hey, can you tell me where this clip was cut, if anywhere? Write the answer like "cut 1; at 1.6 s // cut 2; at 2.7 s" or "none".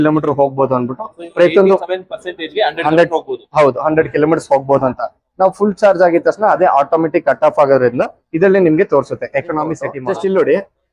cut 1; at 10.0 s